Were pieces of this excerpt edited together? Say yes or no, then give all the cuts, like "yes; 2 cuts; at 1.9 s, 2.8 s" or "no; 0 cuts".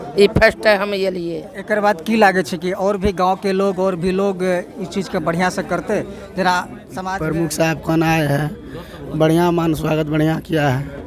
yes; 1 cut; at 6.9 s